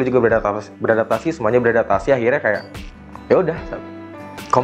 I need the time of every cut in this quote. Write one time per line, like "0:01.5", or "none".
none